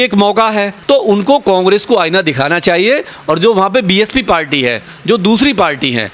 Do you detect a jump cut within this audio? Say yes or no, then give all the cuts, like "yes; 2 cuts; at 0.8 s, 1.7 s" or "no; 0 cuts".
no; 0 cuts